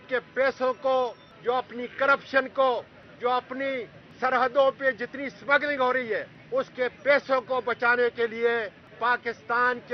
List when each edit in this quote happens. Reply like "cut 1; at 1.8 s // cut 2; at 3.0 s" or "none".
cut 1; at 1.3 s // cut 2; at 3.0 s // cut 3; at 4.0 s // cut 4; at 6.3 s // cut 5; at 8.8 s